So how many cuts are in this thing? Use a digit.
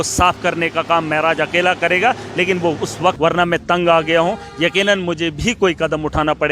1